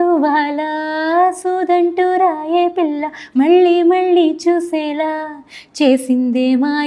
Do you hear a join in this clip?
no; 0 cuts

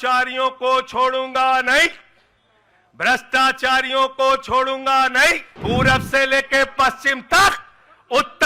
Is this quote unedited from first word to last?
no; 1 cut; at 5.5 s

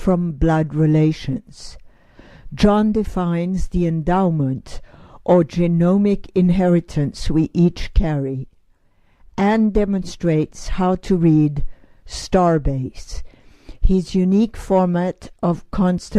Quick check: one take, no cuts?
yes; 0 cuts

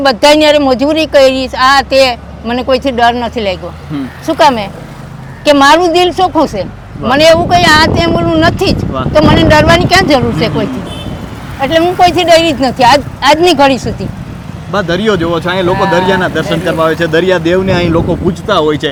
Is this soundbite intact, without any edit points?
yes; 0 cuts

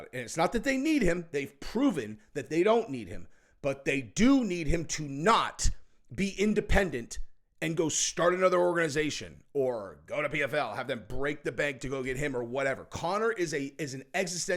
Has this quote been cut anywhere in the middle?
no; 0 cuts

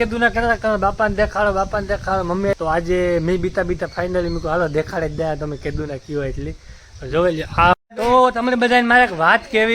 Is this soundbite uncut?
no; 2 cuts; at 2.5 s, 7.7 s

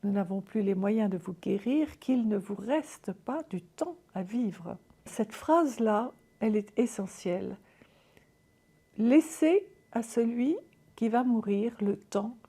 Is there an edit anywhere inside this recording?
yes; 1 cut; at 5.1 s

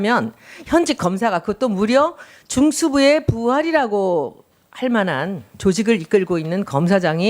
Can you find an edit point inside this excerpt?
yes; 1 cut; at 1.4 s

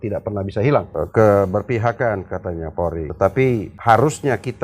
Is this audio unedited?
no; 3 cuts; at 0.9 s, 3.1 s, 3.7 s

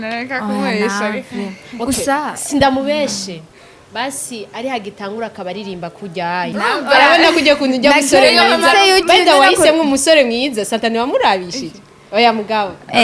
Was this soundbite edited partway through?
yes; 1 cut; at 6.5 s

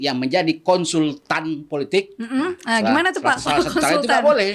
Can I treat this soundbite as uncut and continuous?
yes; 0 cuts

